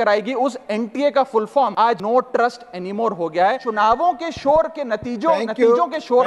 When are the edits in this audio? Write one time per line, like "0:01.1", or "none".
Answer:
0:01.9
0:03.6